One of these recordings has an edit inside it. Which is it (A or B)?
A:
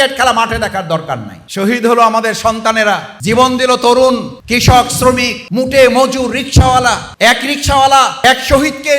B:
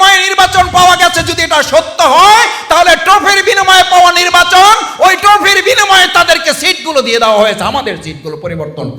A